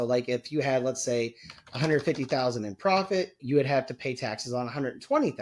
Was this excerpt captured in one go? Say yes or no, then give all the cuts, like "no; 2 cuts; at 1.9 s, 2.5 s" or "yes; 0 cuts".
no; 1 cut; at 3.4 s